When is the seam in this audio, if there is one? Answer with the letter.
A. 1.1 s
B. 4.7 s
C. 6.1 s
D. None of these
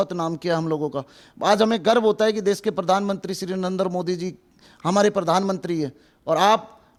D